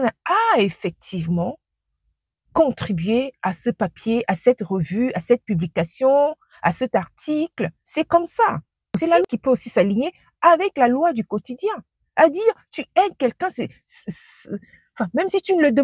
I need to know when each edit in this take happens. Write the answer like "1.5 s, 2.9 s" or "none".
9.2 s